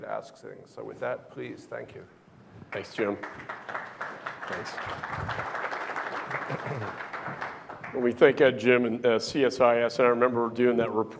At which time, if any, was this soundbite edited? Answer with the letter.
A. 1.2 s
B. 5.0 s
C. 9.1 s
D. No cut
A